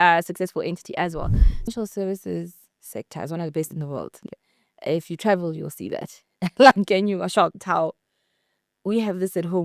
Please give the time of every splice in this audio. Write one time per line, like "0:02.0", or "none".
0:01.7